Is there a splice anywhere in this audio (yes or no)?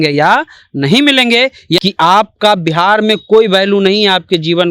yes